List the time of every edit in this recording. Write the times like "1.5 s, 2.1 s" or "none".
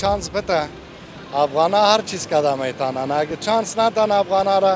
none